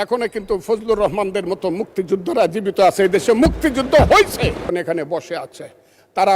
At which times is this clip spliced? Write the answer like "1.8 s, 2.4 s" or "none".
4.7 s